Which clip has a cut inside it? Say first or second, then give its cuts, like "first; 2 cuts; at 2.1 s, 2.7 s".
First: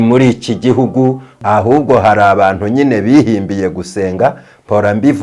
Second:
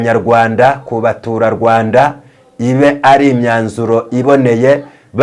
first; 1 cut; at 1.3 s